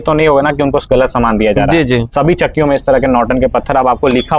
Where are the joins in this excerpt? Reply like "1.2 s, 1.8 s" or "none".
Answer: none